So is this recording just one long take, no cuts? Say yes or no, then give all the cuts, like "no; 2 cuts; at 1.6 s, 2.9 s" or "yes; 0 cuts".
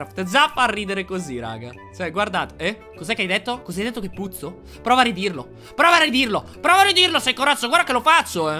yes; 0 cuts